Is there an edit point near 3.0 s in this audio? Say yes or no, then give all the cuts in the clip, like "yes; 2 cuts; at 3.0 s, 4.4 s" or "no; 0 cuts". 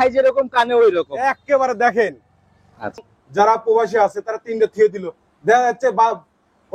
yes; 1 cut; at 3.0 s